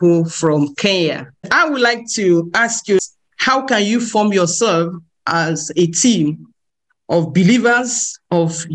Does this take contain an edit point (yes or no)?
yes